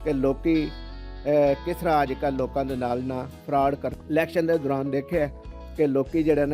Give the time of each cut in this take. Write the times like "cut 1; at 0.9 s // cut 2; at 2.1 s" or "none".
cut 1; at 4.0 s